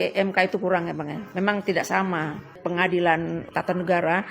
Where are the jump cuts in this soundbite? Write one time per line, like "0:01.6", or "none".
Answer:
0:01.2
0:02.6
0:03.5